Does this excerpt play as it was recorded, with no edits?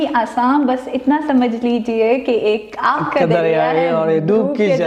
yes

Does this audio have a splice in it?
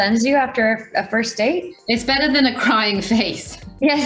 no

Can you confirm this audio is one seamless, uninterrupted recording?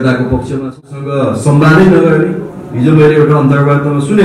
no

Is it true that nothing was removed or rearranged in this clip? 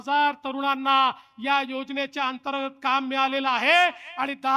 yes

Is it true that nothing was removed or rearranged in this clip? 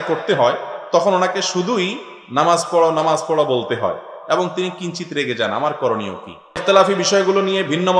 no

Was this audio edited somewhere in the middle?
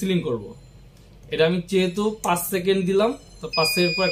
no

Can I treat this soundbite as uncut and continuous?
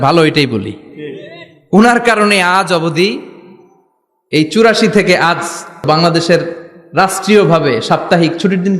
no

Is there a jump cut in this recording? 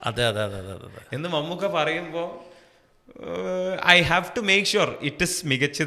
no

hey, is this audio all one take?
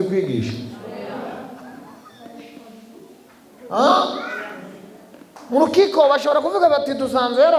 yes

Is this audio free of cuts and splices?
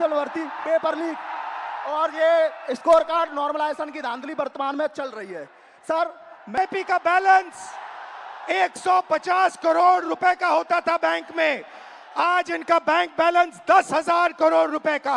no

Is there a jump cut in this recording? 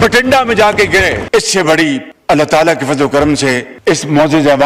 no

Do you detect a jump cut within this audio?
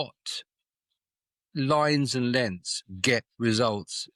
no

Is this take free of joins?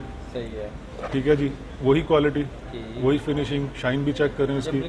yes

